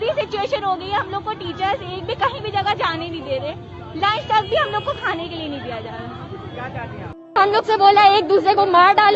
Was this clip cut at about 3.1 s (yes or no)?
no